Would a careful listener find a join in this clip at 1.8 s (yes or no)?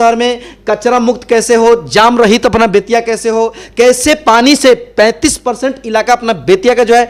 no